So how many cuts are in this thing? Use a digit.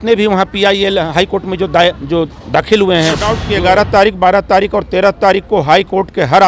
1